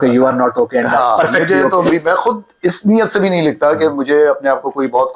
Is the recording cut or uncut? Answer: cut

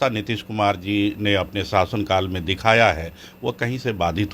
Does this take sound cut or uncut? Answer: uncut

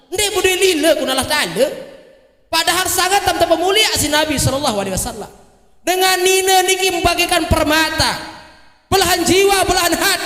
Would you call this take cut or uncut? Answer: uncut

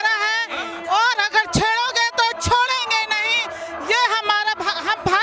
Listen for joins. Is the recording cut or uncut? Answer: uncut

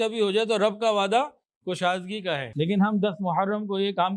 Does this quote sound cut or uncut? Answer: uncut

